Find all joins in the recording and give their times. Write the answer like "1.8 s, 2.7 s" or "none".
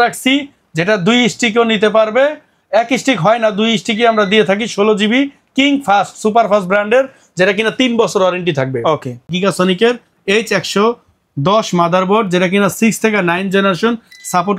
9.3 s